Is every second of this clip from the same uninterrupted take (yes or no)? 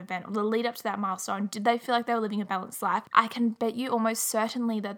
no